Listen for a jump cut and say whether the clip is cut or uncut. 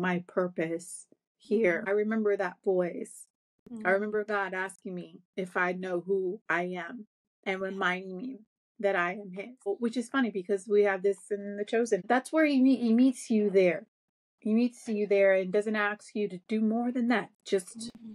cut